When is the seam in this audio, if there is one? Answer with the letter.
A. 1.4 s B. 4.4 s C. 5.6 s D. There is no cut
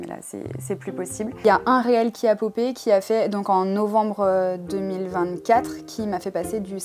A